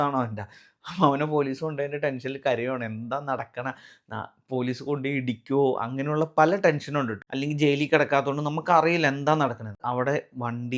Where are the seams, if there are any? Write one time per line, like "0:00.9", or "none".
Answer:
0:07.2
0:09.8